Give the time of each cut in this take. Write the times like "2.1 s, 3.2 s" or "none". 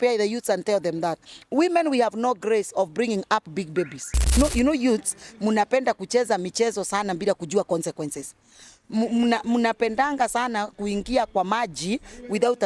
4.4 s

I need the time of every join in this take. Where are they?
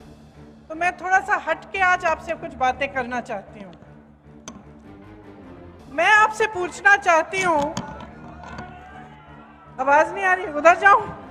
none

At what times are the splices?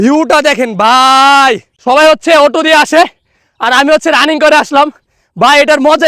1.7 s

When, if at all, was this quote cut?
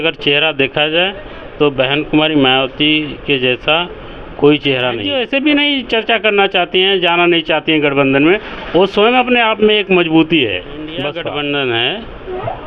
4.8 s, 11.1 s

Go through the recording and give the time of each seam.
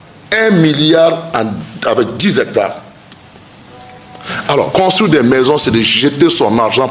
4.7 s

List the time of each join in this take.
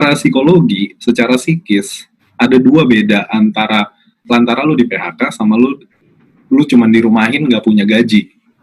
none

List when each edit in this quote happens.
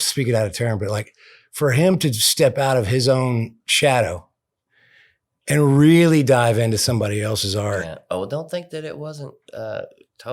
3.6 s

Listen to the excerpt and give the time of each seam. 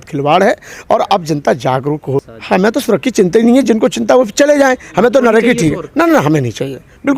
2.3 s

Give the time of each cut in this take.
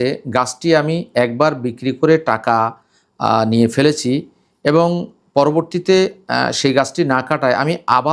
none

